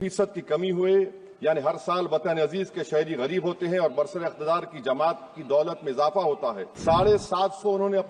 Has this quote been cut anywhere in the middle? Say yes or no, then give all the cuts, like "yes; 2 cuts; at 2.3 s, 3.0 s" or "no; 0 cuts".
yes; 1 cut; at 6.7 s